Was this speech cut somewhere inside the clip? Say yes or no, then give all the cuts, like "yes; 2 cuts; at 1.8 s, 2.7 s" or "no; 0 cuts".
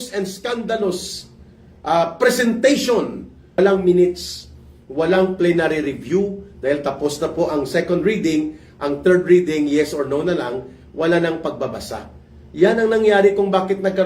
yes; 1 cut; at 3.6 s